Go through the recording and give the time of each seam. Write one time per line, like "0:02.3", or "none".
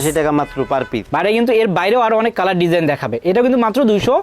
0:01.1